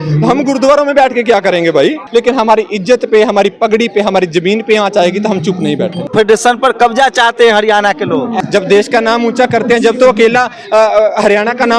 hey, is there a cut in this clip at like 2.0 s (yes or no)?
yes